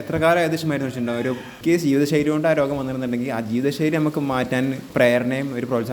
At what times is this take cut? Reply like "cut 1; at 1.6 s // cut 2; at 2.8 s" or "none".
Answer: cut 1; at 1.5 s // cut 2; at 4.8 s